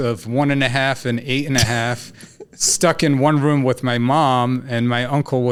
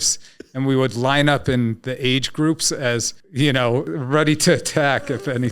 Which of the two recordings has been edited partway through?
second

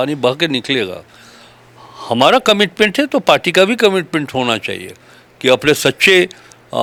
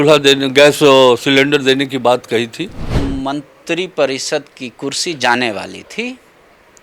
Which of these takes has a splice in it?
second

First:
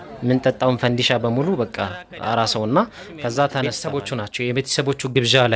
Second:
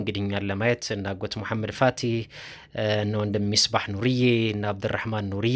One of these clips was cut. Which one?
first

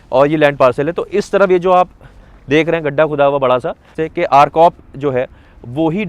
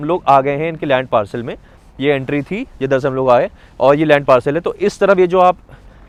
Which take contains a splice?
first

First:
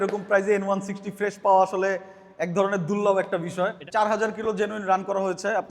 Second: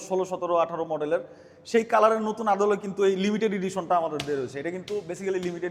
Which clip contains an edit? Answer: first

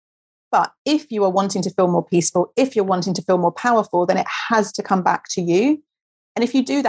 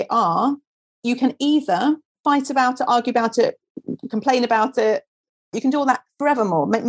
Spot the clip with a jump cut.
second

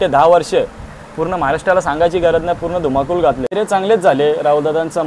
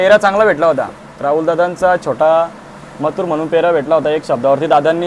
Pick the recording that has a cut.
first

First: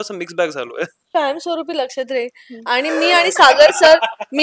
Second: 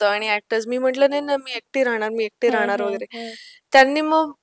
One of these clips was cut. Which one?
first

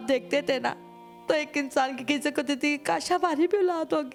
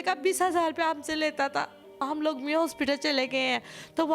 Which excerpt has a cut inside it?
second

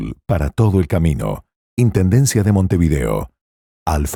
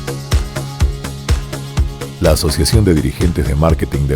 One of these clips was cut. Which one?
second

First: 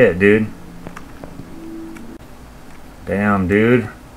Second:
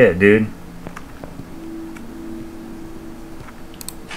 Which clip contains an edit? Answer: first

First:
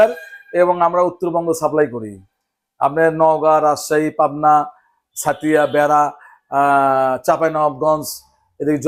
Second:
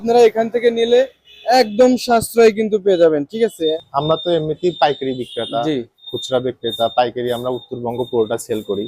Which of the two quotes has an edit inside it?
second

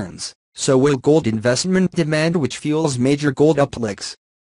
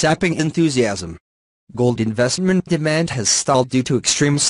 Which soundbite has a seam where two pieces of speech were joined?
first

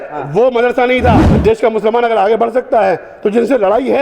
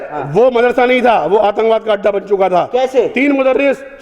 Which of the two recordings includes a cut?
first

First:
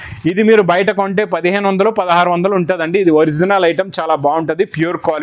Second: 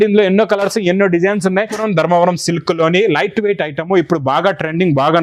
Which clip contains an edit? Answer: second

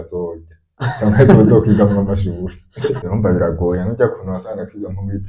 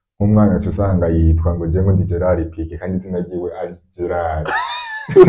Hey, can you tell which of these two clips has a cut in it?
first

